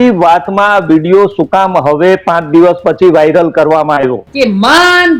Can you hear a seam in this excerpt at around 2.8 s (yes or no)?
no